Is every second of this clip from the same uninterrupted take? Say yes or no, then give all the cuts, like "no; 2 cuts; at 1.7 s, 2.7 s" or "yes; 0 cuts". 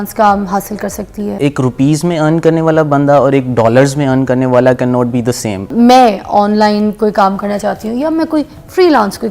no; 2 cuts; at 1.3 s, 5.7 s